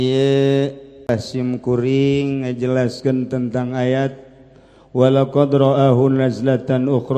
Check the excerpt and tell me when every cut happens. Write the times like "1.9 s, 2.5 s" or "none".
1.1 s